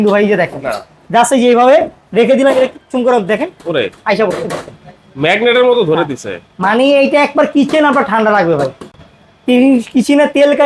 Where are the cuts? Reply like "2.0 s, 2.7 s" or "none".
none